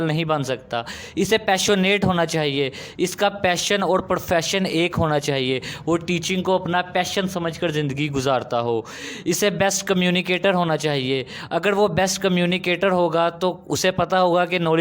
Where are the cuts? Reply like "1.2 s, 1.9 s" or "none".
none